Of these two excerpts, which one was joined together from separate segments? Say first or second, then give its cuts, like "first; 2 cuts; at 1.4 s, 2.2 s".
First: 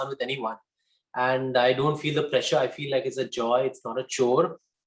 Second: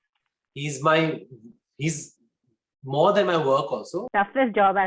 second; 1 cut; at 4.0 s